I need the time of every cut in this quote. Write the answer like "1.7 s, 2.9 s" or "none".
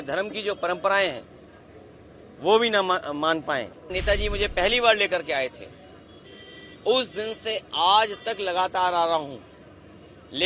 3.9 s